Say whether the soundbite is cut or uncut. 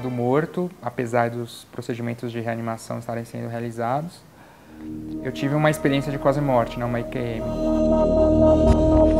uncut